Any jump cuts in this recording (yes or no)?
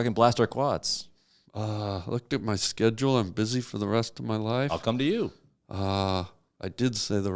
no